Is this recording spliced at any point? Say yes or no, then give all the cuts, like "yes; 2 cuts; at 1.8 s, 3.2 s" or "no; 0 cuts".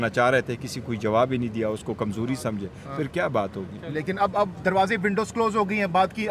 yes; 1 cut; at 5.3 s